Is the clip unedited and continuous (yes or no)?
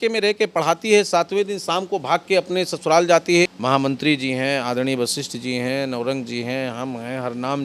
no